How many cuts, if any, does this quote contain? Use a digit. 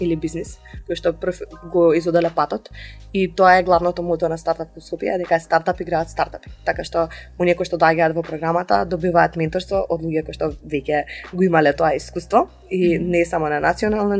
0